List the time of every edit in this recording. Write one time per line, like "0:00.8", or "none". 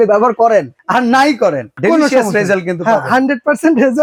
none